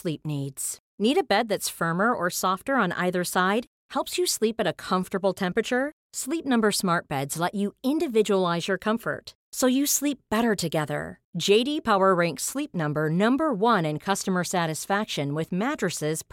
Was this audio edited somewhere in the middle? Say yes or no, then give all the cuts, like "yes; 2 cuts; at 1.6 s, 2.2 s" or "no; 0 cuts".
no; 0 cuts